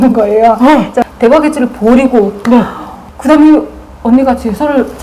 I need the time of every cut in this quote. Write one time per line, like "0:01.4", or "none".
0:01.0